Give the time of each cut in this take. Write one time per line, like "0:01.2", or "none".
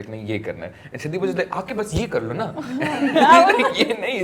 none